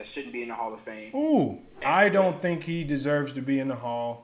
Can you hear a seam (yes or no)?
yes